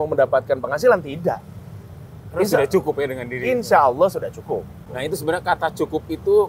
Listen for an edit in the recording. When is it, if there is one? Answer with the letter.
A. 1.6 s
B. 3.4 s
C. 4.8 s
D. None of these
C